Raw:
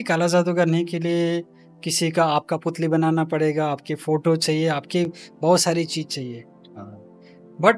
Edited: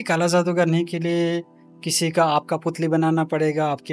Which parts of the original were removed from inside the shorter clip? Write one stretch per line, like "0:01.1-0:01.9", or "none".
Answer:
none